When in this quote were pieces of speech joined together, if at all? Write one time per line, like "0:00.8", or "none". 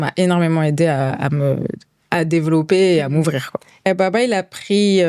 0:03.9